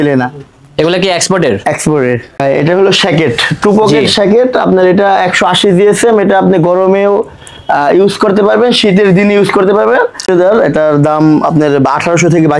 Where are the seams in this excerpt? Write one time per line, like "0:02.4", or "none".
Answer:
0:02.3
0:10.3